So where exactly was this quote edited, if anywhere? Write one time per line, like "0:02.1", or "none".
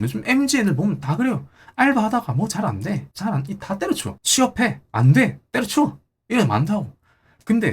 0:03.1
0:04.1